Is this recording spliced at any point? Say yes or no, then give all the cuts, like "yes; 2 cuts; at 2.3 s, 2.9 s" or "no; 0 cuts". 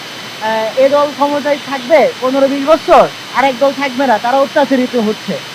no; 0 cuts